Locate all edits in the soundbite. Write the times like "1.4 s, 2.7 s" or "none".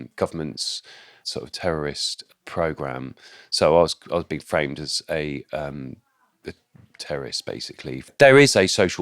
8.1 s